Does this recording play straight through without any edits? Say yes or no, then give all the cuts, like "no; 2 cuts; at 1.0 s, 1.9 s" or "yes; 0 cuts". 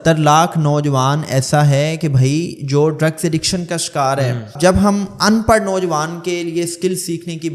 no; 1 cut; at 4.5 s